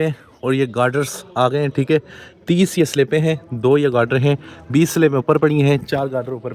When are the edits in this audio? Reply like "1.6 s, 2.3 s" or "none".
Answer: none